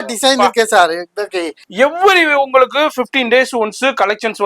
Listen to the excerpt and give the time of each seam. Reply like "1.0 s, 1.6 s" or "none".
1.6 s